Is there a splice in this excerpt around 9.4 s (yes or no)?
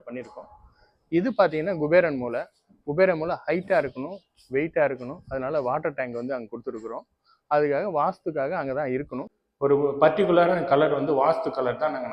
yes